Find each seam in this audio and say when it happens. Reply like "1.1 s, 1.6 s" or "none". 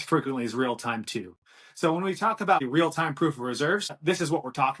2.7 s, 3.9 s